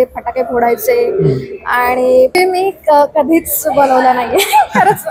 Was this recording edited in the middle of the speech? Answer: yes; 1 cut; at 2.4 s

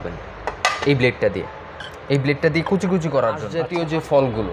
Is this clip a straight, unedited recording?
no; 1 cut; at 3.6 s

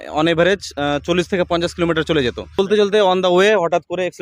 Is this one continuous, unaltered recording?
no; 1 cut; at 2.6 s

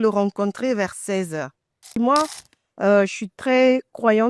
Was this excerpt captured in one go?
no; 1 cut; at 1.9 s

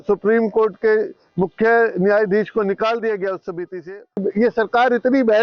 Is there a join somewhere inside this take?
yes; 1 cut; at 4.2 s

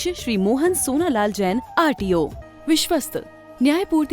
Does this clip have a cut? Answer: yes; 1 cut; at 2.4 s

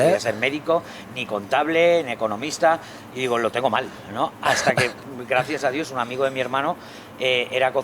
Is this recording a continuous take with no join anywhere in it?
yes; 0 cuts

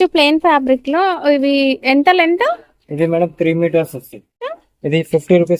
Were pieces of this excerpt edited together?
yes; 1 cut; at 4.6 s

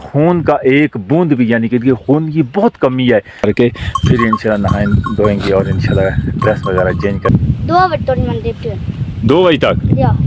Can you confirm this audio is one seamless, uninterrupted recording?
no; 2 cuts; at 3.4 s, 7.3 s

